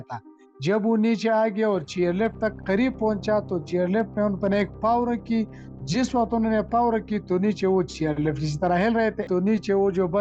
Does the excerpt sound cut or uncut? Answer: cut